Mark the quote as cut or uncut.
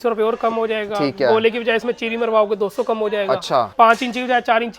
cut